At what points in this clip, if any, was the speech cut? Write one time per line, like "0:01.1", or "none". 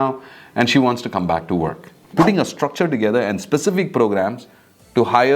0:02.0

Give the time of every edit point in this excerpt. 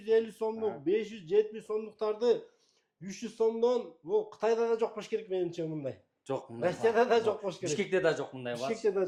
none

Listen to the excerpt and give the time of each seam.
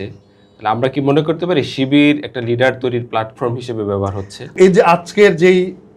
0:04.5

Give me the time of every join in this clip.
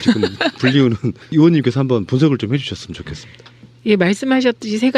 0:02.9

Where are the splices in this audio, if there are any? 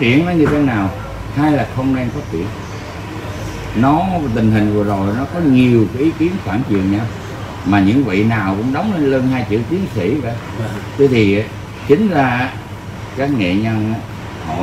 none

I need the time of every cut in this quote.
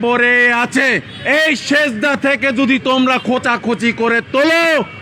0:01.1

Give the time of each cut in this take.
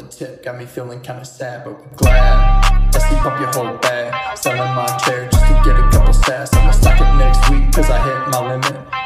0:02.8

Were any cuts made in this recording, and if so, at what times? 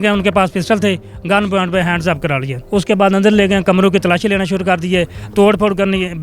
0:02.5

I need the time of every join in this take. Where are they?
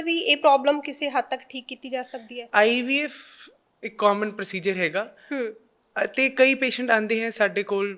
0:02.4

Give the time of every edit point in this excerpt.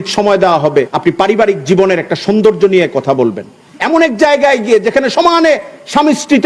0:00.9

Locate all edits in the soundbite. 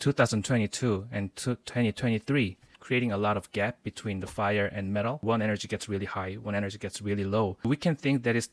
0:05.2

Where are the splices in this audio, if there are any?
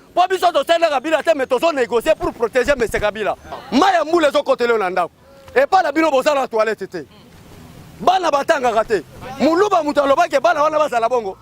0:03.6

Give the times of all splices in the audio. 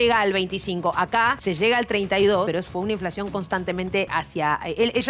0:01.4
0:02.5
0:04.1

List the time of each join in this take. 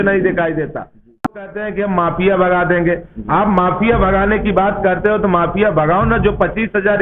0:01.3

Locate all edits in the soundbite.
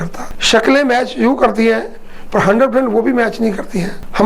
none

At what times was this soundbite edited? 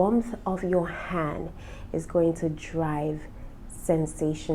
none

